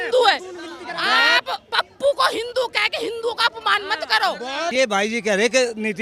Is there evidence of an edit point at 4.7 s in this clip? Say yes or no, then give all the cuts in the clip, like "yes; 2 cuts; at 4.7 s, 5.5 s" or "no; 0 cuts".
yes; 1 cut; at 4.7 s